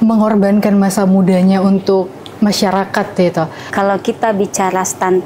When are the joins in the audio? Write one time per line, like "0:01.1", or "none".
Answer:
0:03.6